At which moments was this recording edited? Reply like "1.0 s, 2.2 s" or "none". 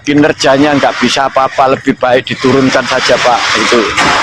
none